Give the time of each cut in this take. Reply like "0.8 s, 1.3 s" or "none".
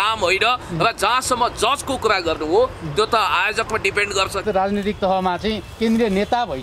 4.4 s